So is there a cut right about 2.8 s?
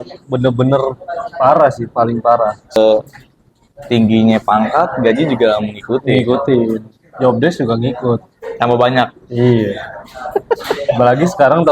yes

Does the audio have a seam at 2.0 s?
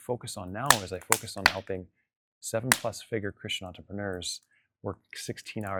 no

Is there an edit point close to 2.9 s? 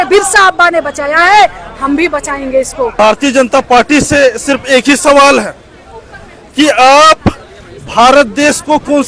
yes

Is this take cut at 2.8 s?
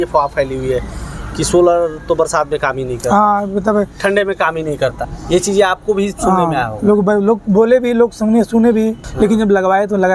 no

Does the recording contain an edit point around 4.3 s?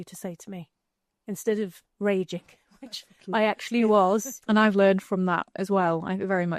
yes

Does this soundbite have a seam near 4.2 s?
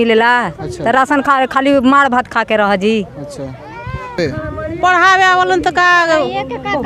yes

